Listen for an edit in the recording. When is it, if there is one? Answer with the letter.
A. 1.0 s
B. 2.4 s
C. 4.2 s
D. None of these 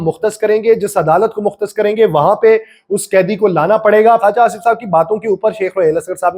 C